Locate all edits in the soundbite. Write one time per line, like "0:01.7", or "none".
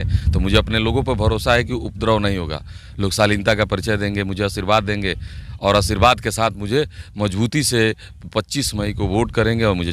none